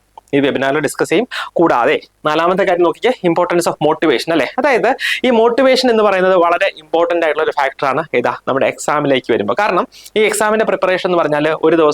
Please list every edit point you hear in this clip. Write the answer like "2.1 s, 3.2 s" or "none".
none